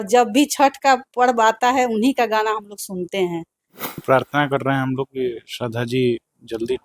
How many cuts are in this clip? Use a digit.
1